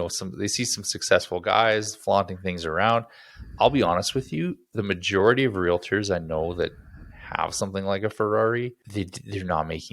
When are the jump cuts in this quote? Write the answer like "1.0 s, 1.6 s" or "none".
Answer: 8.8 s